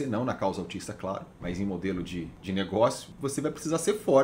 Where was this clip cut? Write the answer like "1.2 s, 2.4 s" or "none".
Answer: 2.3 s, 3.1 s

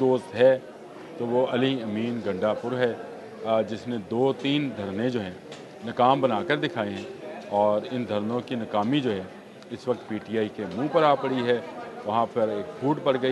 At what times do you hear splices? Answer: none

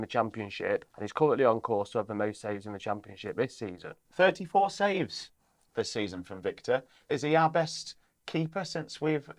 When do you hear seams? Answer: 0.9 s, 4.0 s, 7.0 s

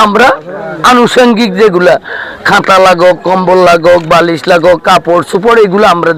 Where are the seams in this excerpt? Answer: none

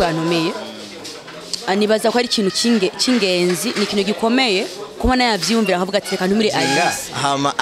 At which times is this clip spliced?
6.7 s

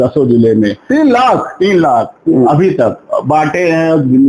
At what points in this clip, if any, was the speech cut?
none

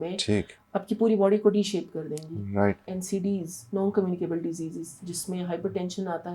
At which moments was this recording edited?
2.9 s

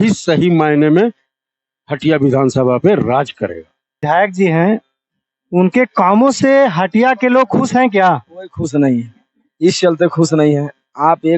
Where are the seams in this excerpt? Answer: 4.0 s

